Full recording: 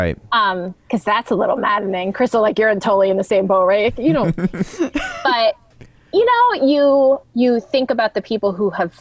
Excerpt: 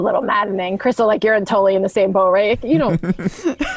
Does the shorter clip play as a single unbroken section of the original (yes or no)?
yes